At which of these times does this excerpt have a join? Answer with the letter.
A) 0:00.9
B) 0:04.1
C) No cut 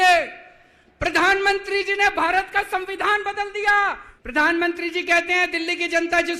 B